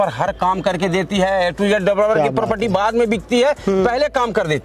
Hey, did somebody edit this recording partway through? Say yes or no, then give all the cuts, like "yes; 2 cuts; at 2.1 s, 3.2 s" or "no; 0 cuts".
no; 0 cuts